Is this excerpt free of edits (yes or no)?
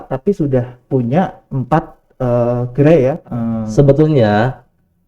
no